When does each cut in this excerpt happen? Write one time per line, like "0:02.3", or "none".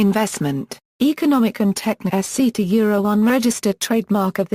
none